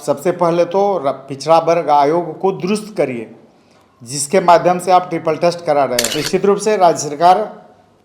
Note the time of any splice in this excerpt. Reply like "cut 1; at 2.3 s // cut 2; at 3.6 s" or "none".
cut 1; at 6.2 s